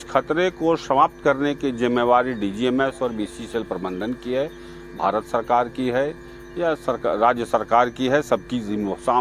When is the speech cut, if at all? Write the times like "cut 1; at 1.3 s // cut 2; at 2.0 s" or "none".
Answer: none